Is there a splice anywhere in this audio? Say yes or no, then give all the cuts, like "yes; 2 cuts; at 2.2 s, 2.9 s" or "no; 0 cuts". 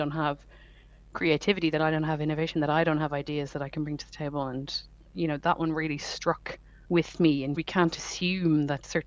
yes; 1 cut; at 7.6 s